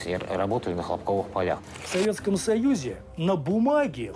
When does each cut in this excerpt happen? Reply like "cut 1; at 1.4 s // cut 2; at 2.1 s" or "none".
cut 1; at 1.7 s